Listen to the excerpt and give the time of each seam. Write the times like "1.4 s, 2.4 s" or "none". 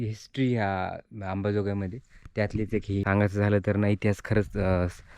3.0 s